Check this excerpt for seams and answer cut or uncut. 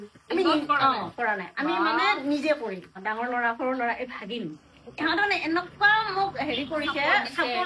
cut